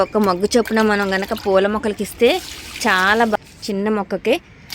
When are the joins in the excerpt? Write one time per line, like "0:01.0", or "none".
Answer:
0:03.3